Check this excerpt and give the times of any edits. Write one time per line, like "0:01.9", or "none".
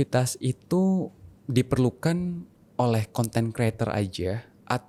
none

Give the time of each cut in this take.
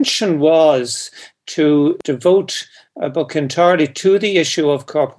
0:02.0

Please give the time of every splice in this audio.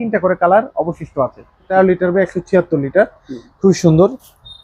0:01.6

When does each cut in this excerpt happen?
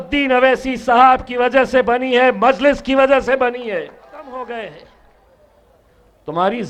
0:04.3

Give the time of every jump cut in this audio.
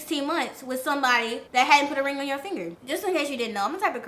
0:01.4
0:02.7

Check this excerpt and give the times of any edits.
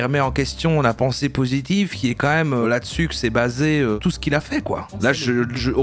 0:02.6
0:04.0
0:04.9

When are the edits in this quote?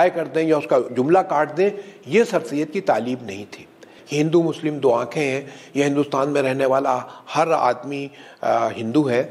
0:03.9

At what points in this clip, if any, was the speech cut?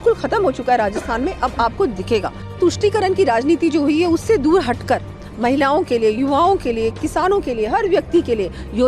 0:02.6

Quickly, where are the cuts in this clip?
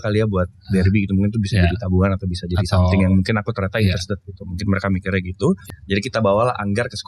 0:05.7

